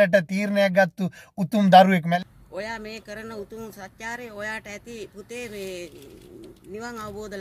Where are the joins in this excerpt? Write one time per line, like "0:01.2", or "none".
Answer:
0:02.1